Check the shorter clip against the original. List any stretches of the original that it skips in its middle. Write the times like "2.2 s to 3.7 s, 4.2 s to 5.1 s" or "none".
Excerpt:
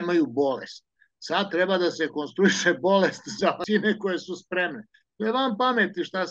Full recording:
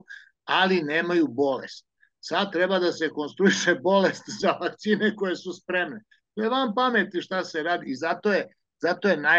4.6 s to 4.8 s